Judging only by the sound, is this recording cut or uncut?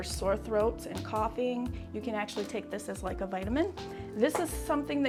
uncut